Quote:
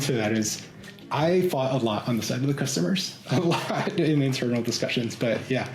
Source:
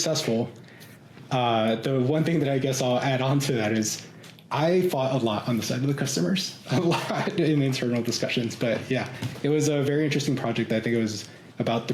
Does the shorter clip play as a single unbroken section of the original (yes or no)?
yes